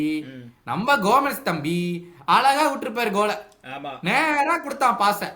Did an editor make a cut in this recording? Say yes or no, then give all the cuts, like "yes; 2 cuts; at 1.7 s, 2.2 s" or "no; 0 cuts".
no; 0 cuts